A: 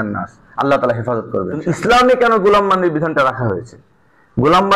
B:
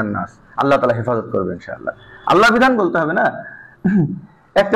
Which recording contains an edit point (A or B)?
A